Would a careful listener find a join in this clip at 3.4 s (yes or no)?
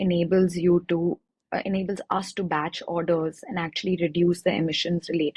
no